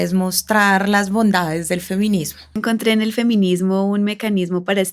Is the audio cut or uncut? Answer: cut